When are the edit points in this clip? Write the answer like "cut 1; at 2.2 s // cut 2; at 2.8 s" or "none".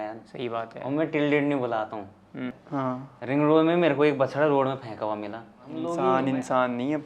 cut 1; at 2.6 s // cut 2; at 5.8 s